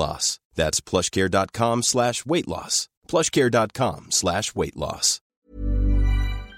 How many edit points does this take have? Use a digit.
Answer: 1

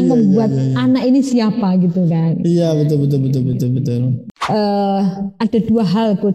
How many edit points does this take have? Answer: 1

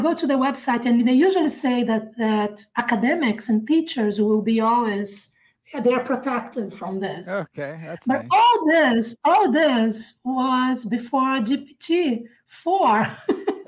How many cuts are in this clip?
0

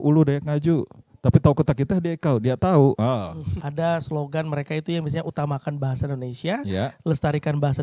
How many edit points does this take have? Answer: 1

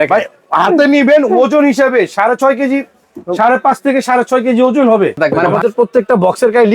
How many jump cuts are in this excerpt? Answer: 1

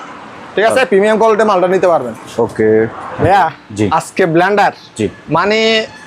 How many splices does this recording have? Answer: 1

